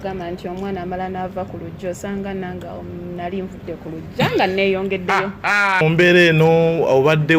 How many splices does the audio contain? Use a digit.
1